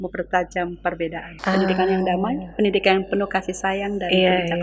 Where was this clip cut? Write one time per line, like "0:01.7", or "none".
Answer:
0:01.3